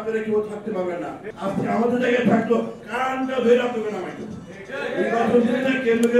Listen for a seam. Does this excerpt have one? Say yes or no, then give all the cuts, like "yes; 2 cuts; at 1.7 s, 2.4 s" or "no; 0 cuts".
yes; 1 cut; at 1.2 s